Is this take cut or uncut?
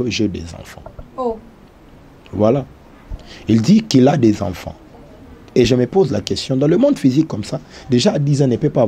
uncut